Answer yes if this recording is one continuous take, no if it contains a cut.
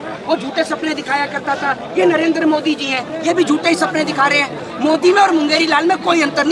yes